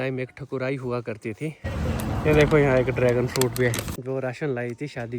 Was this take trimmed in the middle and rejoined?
yes; 2 cuts; at 1.6 s, 3.8 s

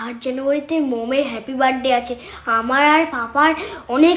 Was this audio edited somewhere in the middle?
no; 0 cuts

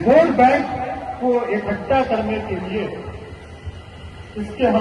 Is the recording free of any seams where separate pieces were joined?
yes; 0 cuts

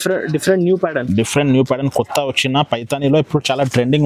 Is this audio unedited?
yes; 0 cuts

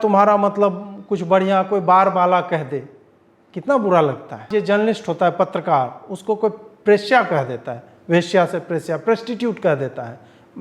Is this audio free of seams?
no; 1 cut; at 4.5 s

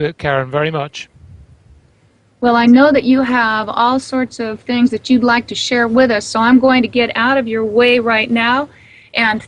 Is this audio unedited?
yes; 0 cuts

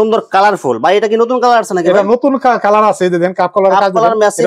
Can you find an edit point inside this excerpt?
no; 0 cuts

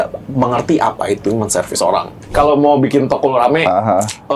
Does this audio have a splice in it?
yes; 1 cut; at 2.3 s

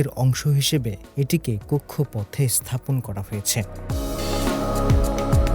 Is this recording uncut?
yes; 0 cuts

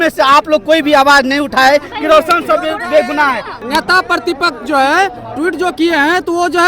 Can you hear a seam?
yes; 1 cut; at 3.6 s

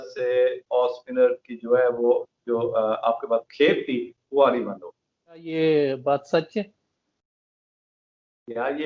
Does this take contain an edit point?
yes; 1 cut; at 5.5 s

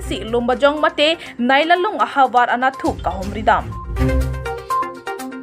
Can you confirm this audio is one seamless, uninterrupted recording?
no; 1 cut; at 3.9 s

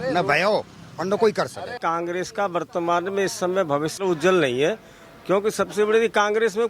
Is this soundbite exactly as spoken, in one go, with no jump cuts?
no; 2 cuts; at 1.8 s, 3.9 s

